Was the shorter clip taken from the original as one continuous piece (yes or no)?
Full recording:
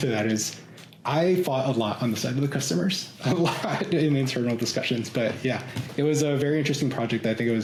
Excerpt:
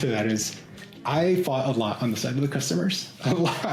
yes